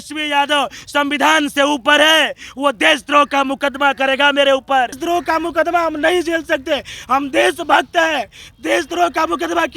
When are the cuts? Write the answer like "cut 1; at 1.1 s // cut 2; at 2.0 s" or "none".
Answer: cut 1; at 5.0 s